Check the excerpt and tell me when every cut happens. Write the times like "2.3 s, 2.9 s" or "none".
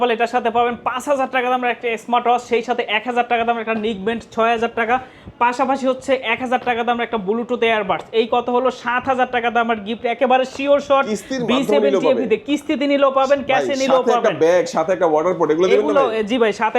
none

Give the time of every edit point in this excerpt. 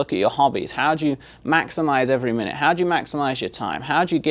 none

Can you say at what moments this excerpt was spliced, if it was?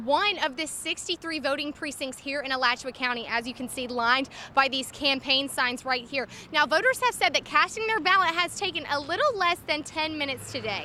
none

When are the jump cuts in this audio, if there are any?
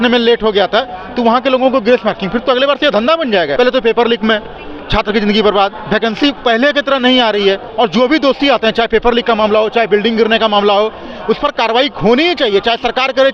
3.5 s, 7.7 s

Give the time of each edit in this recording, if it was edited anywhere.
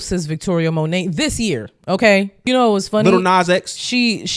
2.3 s

